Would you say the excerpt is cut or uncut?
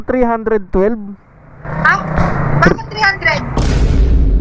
uncut